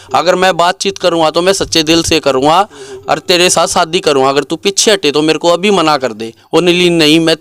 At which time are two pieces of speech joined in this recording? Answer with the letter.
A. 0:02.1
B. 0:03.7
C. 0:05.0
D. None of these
D